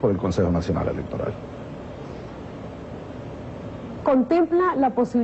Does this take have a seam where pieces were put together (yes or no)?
no